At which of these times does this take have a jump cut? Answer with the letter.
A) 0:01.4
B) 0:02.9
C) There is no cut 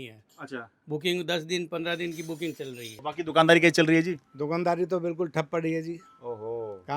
B